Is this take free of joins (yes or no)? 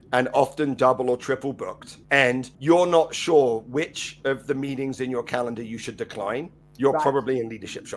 no